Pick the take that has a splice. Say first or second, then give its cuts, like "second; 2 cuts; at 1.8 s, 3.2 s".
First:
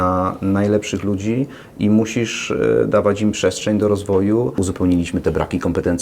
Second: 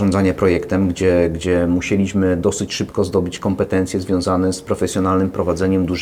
first; 1 cut; at 4.6 s